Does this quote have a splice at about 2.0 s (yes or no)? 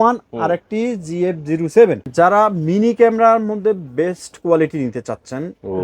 yes